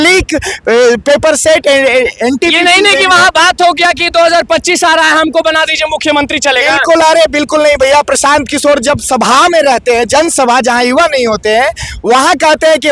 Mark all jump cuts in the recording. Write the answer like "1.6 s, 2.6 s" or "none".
none